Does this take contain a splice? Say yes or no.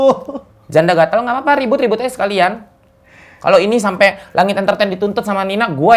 no